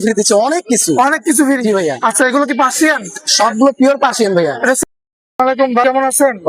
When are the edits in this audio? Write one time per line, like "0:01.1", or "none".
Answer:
0:04.8